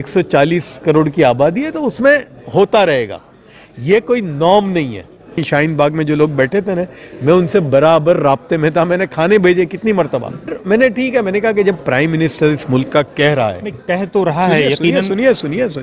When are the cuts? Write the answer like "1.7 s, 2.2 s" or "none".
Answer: 5.4 s, 10.6 s